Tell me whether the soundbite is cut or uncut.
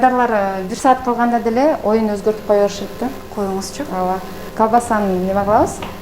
uncut